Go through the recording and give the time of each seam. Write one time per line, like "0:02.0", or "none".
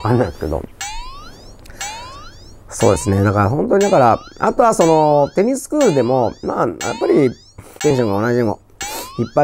0:07.9